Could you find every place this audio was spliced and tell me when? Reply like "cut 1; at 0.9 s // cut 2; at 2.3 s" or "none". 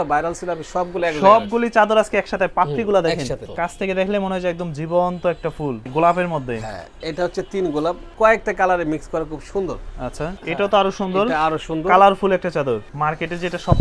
cut 1; at 3.5 s // cut 2; at 5.9 s // cut 3; at 8.1 s // cut 4; at 10.4 s // cut 5; at 12.9 s